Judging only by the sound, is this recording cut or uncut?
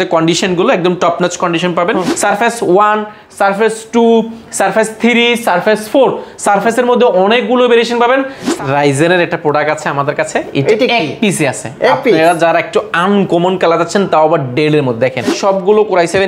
cut